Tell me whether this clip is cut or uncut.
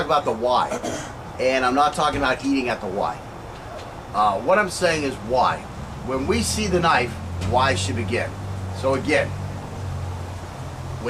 uncut